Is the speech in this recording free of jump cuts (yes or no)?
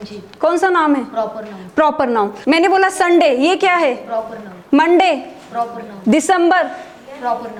yes